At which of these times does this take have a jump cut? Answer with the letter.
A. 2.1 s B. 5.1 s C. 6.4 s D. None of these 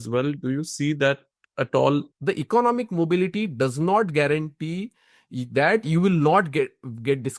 A